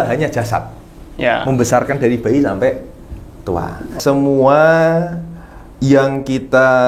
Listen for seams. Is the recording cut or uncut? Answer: cut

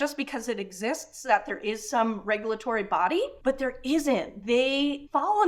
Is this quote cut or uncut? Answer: uncut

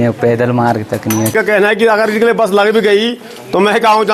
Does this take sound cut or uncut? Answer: cut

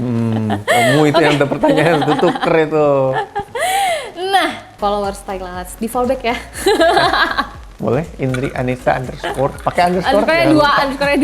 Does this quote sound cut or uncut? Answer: cut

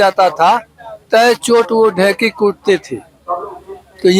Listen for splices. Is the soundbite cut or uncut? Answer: uncut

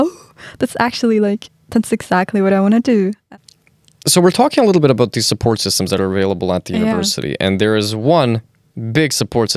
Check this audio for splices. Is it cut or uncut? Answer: cut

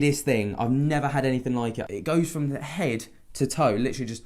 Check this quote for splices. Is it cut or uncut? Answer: cut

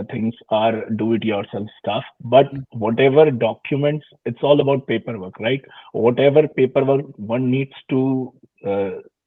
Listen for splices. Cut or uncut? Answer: uncut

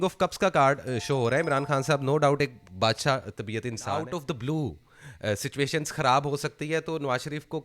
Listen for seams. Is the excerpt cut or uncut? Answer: cut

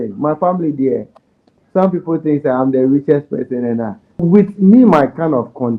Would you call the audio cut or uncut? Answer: cut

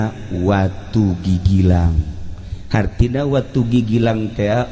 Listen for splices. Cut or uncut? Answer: uncut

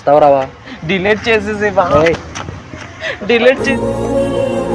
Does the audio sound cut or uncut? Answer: uncut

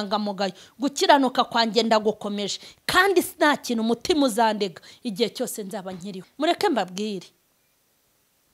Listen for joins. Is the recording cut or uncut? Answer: cut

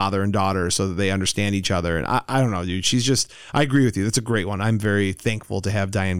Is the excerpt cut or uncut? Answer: uncut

